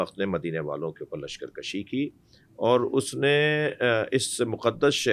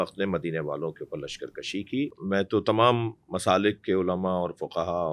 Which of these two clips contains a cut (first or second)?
second